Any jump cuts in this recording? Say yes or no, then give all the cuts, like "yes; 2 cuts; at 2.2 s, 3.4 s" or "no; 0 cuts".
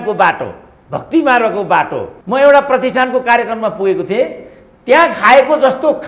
yes; 1 cut; at 2.1 s